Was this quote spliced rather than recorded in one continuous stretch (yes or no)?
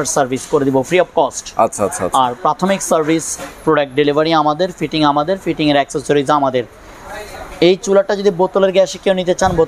no